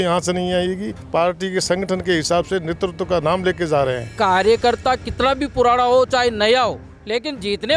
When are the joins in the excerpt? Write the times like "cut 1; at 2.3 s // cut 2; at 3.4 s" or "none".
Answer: cut 1; at 0.9 s // cut 2; at 4.1 s